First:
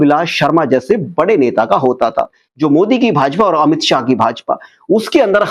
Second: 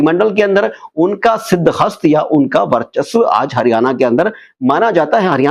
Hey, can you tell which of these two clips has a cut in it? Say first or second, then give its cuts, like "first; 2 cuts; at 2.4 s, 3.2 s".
first; 1 cut; at 2.4 s